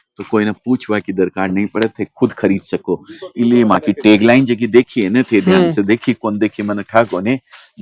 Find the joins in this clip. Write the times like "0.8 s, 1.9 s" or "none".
none